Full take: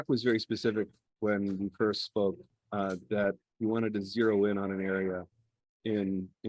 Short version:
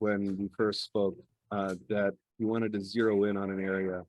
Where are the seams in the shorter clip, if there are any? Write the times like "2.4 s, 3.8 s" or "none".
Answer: none